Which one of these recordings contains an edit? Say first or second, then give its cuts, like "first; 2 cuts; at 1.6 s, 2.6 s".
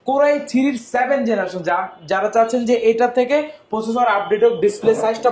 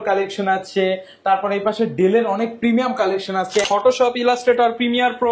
second; 1 cut; at 3.7 s